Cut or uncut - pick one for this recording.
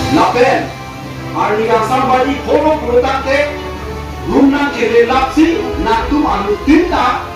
uncut